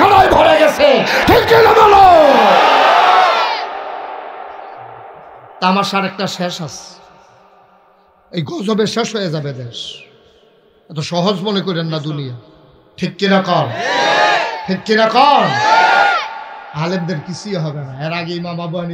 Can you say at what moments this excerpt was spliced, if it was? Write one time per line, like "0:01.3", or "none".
none